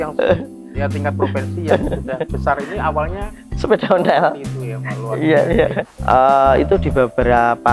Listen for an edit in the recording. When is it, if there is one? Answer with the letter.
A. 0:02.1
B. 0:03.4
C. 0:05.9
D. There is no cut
C